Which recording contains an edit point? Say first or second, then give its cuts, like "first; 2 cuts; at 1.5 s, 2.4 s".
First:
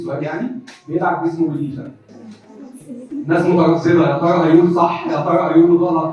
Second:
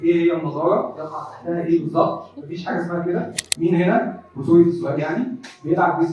second; 1 cut; at 3.4 s